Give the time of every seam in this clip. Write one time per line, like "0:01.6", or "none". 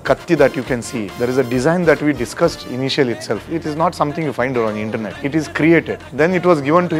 0:01.1
0:03.5
0:05.2
0:06.0